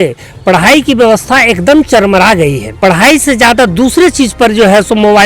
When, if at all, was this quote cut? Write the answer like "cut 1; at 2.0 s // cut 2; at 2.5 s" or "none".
cut 1; at 2.7 s